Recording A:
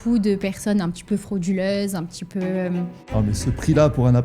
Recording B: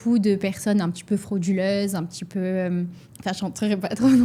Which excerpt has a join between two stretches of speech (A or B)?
A